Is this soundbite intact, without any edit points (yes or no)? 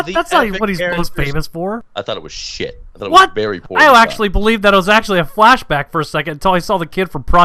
no